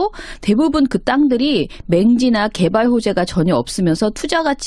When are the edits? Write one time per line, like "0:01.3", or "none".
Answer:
0:03.7